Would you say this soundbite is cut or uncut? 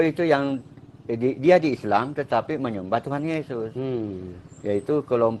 uncut